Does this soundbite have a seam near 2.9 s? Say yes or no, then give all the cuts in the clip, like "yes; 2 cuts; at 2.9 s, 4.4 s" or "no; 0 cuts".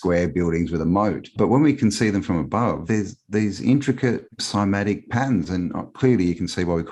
yes; 3 cuts; at 1.3 s, 2.9 s, 4.4 s